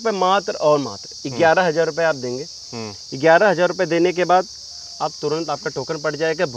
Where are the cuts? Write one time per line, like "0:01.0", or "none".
none